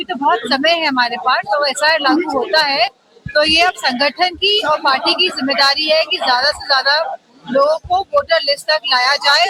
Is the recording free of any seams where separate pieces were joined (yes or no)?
yes